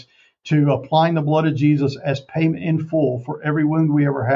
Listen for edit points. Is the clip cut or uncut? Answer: uncut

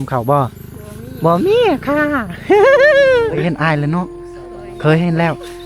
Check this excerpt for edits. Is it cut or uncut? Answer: cut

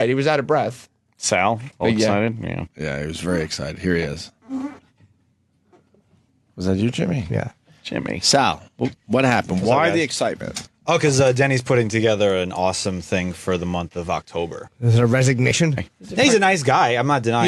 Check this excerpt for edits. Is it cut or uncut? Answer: uncut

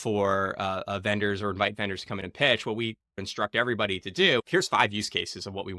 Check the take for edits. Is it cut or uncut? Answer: cut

